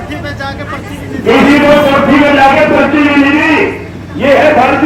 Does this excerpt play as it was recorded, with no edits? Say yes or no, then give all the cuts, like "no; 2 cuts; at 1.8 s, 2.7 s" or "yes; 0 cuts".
yes; 0 cuts